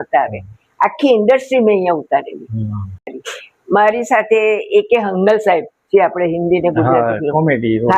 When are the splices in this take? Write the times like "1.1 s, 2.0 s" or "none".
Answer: 3.0 s